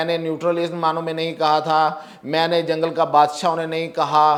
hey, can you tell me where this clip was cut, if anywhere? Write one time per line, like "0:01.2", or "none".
none